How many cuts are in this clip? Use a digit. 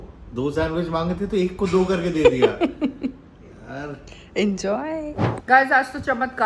1